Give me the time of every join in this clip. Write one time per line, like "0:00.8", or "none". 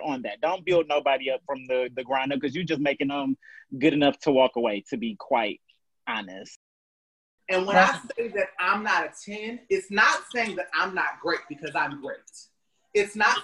0:06.8